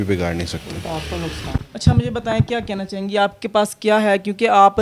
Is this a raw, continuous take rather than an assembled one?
yes; 0 cuts

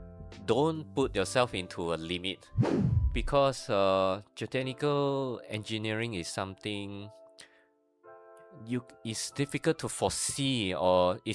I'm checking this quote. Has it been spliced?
yes; 1 cut; at 2.7 s

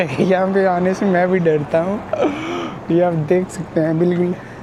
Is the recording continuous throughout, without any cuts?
yes; 0 cuts

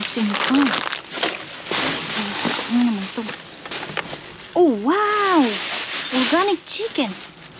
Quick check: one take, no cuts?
no; 1 cut; at 3.7 s

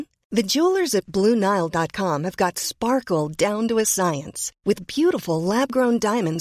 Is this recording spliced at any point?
no; 0 cuts

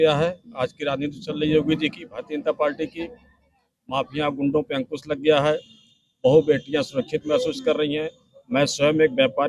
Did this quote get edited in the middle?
no; 0 cuts

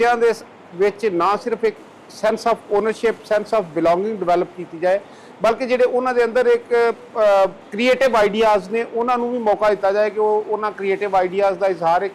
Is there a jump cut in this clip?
no; 0 cuts

